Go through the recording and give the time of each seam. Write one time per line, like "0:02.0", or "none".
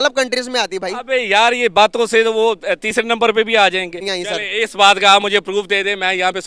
0:04.1